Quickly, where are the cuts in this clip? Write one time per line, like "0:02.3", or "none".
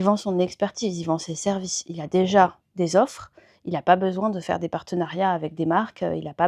none